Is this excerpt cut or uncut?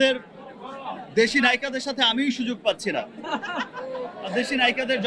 uncut